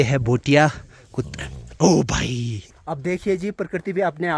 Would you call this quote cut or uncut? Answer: cut